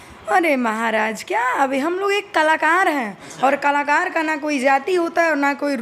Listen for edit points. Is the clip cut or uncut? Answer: uncut